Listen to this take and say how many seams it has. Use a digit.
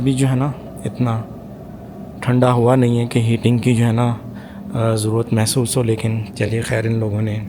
0